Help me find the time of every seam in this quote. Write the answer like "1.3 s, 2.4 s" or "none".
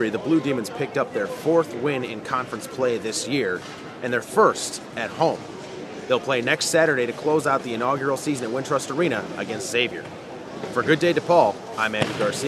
none